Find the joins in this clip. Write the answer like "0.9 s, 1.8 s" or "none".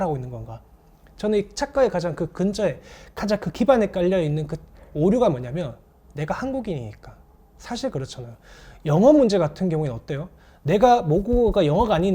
none